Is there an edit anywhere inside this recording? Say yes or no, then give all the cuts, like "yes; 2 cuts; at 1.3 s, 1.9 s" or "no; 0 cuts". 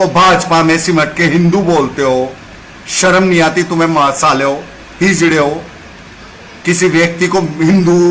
no; 0 cuts